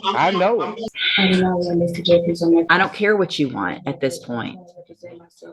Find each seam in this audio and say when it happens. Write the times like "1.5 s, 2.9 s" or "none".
1.0 s